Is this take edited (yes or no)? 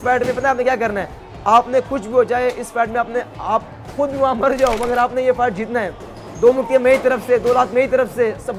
no